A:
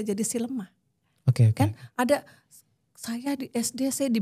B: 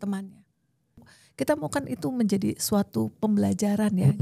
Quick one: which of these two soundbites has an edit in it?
B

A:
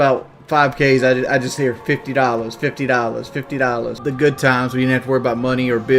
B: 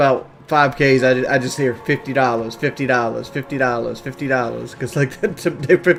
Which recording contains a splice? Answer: A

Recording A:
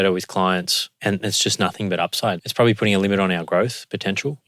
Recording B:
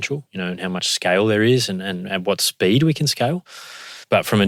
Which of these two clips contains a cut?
A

